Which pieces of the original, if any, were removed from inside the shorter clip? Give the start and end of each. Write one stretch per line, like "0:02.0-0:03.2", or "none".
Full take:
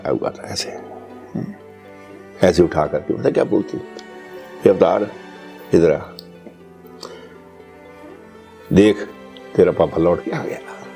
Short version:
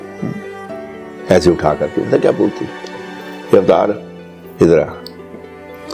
0:06.1-0:07.1